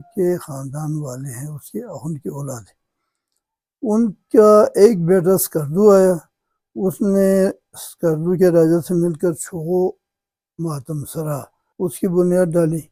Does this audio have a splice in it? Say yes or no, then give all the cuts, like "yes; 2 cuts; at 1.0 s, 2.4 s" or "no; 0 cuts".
no; 0 cuts